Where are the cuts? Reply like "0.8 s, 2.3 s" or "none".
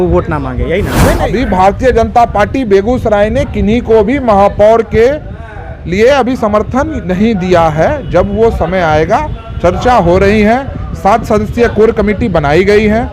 1.2 s